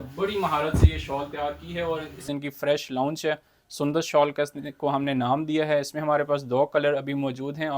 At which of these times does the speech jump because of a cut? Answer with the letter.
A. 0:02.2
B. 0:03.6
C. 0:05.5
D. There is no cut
A